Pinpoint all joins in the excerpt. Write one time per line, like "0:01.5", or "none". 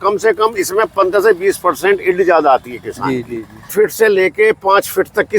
0:03.7